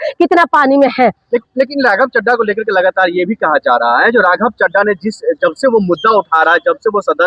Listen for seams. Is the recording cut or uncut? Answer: uncut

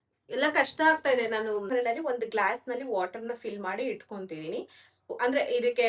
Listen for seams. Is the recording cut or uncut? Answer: cut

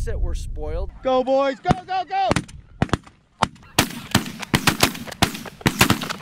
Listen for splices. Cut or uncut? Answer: cut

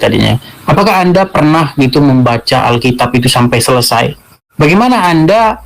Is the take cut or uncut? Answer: cut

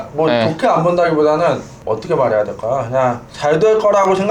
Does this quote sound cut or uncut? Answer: cut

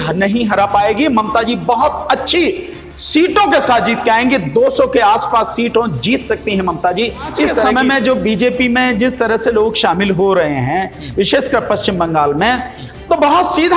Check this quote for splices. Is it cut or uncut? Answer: cut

